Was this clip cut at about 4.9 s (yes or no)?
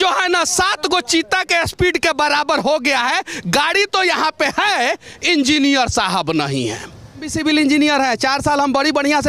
no